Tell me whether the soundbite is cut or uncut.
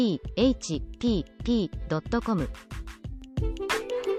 uncut